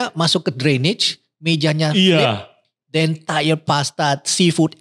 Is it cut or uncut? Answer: uncut